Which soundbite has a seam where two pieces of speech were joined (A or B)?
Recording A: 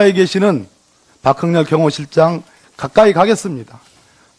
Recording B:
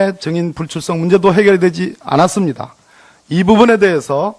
A